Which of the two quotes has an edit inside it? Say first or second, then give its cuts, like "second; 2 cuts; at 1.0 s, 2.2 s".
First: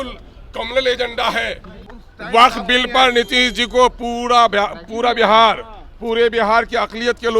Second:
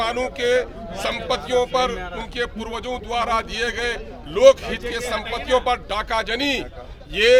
first; 1 cut; at 1.9 s